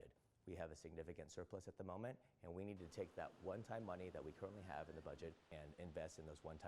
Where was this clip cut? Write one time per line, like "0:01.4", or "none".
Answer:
0:05.4